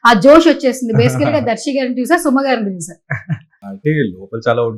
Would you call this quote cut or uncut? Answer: uncut